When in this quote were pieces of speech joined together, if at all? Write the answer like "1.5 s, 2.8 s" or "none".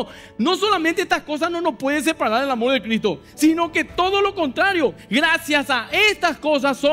none